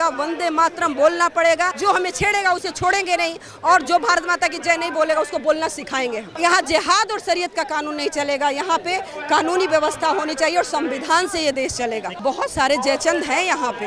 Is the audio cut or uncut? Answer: cut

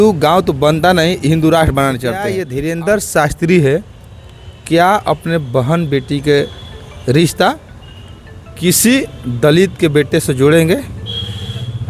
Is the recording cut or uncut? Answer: cut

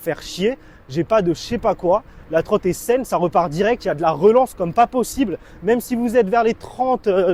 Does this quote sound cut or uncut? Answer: uncut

